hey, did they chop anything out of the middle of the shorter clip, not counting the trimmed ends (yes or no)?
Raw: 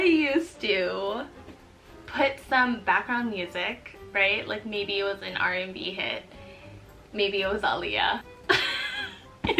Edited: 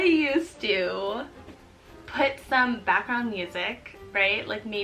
no